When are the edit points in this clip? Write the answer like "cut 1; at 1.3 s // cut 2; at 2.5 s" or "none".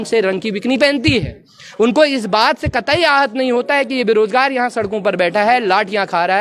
none

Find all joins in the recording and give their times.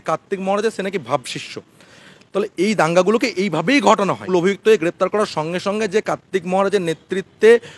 cut 1; at 4.2 s

